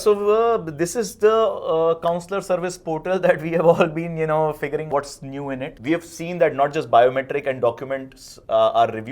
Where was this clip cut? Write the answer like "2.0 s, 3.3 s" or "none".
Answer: 5.7 s